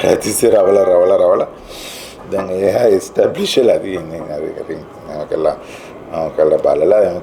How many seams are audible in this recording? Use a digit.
0